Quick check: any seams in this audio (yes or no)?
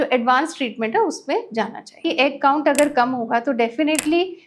yes